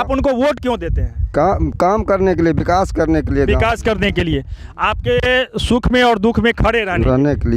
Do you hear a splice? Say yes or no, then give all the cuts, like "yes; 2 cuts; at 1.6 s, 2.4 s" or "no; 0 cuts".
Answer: no; 0 cuts